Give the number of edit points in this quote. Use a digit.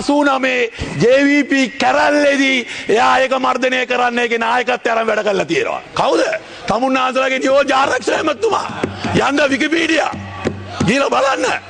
0